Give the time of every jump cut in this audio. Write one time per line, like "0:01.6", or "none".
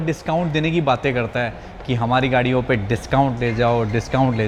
none